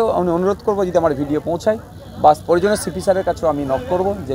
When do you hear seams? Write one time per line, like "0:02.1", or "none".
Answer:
none